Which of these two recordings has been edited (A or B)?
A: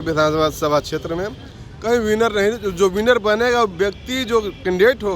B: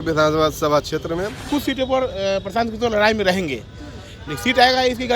B